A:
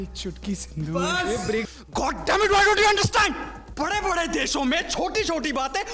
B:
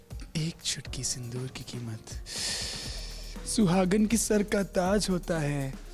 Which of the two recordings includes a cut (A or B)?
A